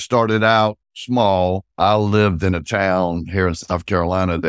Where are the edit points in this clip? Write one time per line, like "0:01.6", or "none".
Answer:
0:00.9
0:01.7